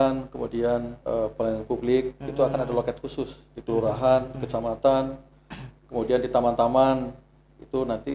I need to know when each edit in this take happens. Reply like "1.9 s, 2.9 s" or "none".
0.9 s